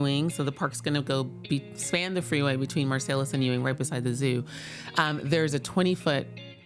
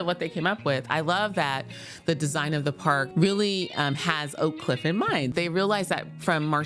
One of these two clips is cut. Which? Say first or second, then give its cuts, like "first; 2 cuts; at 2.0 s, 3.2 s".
second; 2 cuts; at 3.1 s, 5.3 s